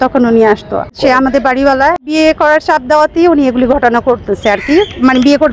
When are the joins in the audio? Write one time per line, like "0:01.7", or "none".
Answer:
0:00.9
0:02.1